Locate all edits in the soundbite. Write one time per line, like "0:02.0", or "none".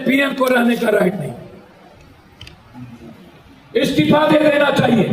none